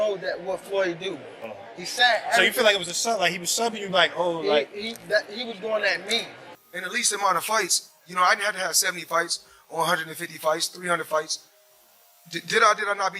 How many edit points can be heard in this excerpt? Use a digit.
1